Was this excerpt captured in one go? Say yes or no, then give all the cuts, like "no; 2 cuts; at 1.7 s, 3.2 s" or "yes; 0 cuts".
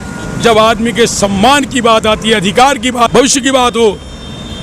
no; 1 cut; at 3.1 s